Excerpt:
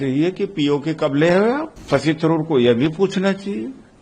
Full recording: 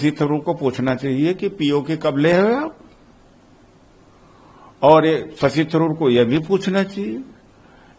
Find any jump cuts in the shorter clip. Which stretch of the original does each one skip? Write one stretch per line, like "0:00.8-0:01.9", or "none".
0:02.8-0:05.3